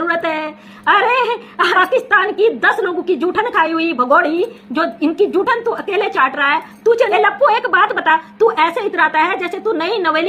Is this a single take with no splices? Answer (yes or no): no